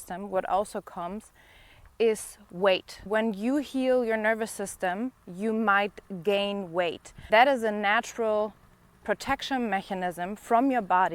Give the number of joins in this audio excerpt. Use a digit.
2